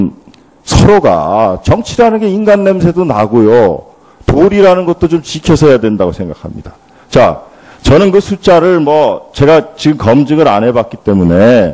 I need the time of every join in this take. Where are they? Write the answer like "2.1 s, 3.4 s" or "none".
none